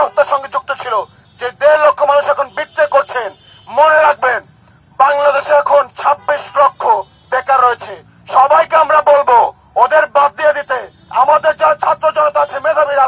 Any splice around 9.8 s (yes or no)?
no